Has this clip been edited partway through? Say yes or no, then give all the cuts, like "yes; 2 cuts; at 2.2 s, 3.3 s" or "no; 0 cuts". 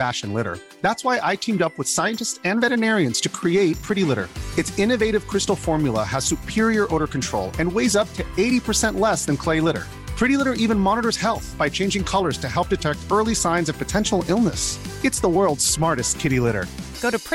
no; 0 cuts